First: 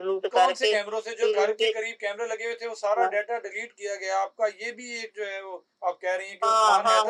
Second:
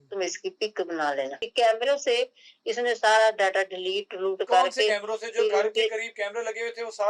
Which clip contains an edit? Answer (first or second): second